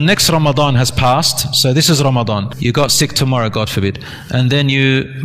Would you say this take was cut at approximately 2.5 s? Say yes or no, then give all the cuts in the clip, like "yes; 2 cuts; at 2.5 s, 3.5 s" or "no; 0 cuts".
yes; 1 cut; at 2.5 s